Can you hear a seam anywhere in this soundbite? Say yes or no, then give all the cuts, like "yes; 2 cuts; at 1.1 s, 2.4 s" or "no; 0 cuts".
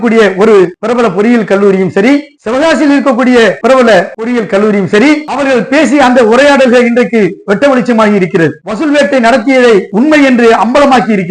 yes; 4 cuts; at 3.9 s, 5.3 s, 8.6 s, 9.9 s